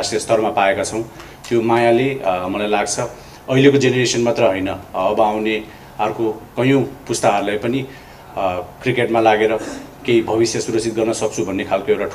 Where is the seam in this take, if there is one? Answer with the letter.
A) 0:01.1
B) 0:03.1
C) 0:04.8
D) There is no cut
A